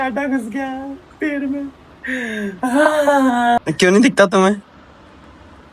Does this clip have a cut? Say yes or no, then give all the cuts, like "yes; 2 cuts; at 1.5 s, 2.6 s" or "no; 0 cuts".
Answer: yes; 1 cut; at 3.6 s